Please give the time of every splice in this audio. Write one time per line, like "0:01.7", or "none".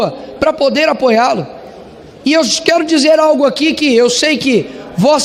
none